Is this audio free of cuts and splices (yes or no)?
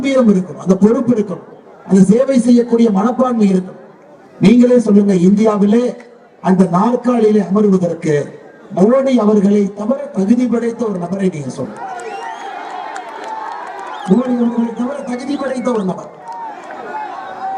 yes